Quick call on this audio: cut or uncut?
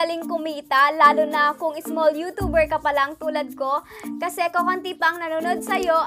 uncut